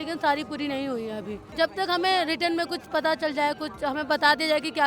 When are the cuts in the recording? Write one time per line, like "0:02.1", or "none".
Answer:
0:01.4